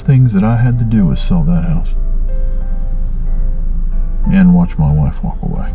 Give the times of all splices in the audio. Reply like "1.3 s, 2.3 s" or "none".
none